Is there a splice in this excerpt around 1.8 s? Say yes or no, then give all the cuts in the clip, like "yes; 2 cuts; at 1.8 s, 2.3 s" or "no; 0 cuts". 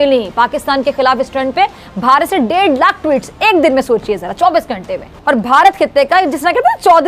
no; 1 cut; at 5.1 s